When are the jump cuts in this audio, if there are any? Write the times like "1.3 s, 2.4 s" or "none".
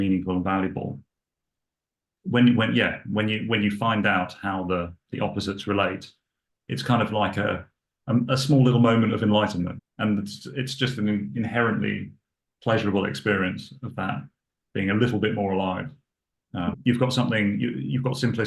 1.3 s, 9.8 s, 16.7 s